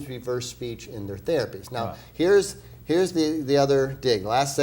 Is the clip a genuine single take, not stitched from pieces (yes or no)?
no